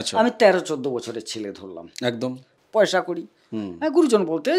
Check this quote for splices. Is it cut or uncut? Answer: cut